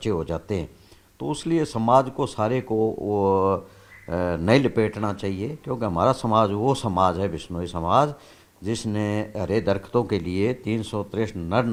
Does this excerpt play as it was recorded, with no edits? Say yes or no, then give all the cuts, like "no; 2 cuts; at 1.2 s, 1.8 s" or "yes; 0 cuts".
yes; 0 cuts